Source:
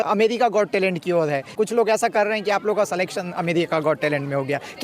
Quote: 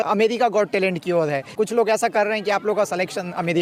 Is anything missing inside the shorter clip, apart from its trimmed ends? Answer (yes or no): no